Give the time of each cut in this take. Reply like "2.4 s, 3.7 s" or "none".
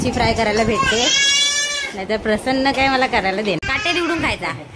3.6 s